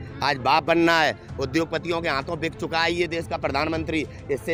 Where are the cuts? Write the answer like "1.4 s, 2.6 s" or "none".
none